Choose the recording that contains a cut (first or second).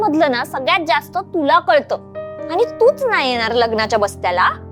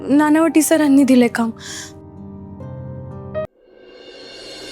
second